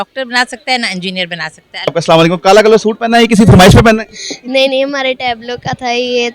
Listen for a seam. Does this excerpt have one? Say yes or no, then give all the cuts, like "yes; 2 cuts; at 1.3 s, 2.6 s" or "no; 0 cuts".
yes; 1 cut; at 2.0 s